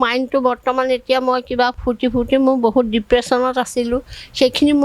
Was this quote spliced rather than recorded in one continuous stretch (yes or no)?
no